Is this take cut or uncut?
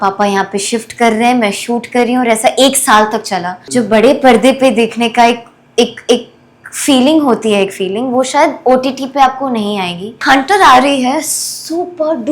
cut